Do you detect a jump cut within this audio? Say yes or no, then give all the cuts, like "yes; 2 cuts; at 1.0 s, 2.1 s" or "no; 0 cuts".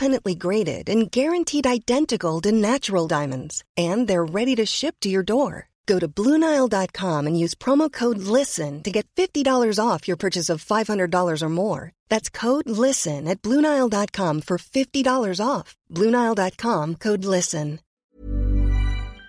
yes; 1 cut; at 18.0 s